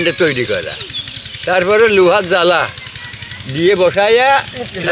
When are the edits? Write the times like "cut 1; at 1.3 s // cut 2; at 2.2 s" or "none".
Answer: none